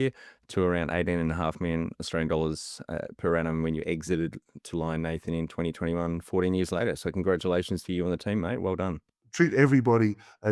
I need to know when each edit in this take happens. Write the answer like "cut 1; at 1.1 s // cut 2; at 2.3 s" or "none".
cut 1; at 9.1 s